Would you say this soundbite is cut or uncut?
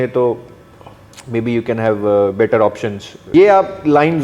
cut